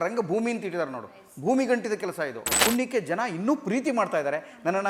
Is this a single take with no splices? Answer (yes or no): no